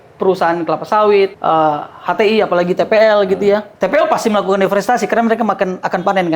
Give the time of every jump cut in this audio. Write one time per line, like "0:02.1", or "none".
0:01.4
0:03.7